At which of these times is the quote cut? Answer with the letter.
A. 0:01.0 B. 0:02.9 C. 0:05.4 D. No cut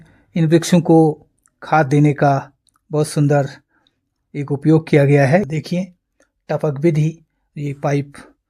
C